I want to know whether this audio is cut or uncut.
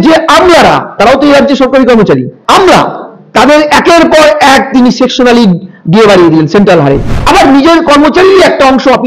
cut